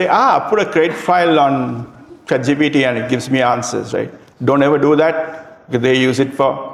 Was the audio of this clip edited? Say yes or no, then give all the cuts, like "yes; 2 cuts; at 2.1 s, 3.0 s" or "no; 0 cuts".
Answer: no; 0 cuts